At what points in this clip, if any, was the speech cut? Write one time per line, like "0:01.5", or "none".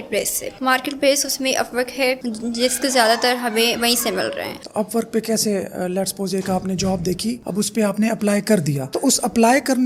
none

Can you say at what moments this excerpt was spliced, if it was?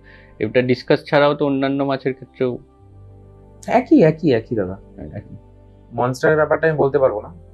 none

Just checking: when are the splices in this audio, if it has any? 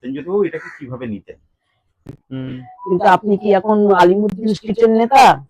0:02.2

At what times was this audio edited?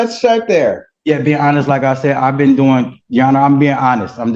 none

